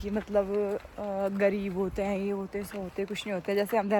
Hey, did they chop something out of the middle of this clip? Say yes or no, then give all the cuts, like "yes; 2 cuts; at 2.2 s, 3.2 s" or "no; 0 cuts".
no; 0 cuts